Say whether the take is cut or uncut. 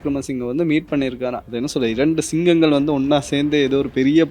cut